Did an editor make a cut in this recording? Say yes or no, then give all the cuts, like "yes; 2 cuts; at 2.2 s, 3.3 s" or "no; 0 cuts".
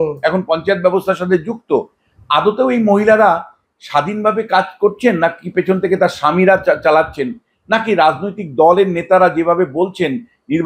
no; 0 cuts